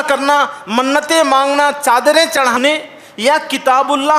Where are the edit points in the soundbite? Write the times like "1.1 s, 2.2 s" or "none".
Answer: 2.5 s